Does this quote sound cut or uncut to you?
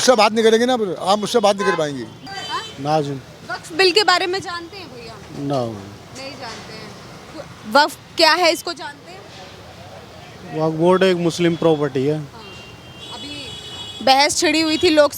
cut